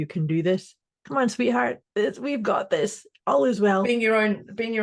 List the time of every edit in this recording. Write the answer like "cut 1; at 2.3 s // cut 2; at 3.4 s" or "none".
cut 1; at 1.8 s

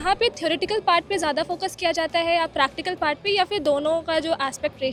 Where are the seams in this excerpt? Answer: none

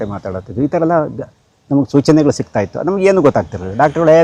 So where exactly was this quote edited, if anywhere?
none

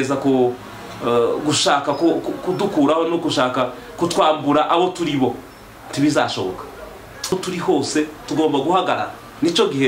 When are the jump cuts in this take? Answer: cut 1; at 7.3 s

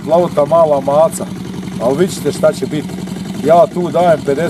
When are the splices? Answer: none

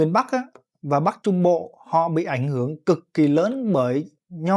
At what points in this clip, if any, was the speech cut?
none

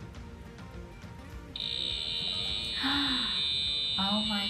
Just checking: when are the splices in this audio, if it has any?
none

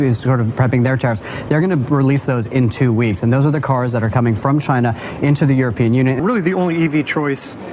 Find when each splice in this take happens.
cut 1; at 6.2 s

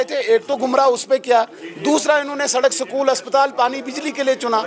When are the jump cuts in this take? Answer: none

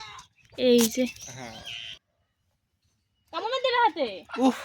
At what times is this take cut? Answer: cut 1; at 2.1 s

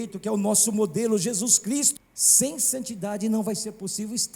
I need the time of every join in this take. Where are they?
cut 1; at 1.9 s

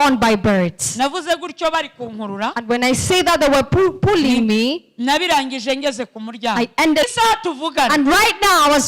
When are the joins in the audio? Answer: cut 1; at 7.1 s

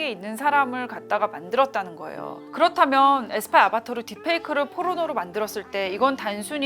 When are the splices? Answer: cut 1; at 2.4 s

